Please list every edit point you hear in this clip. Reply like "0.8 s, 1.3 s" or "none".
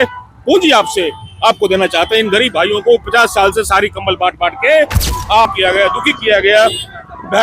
5.5 s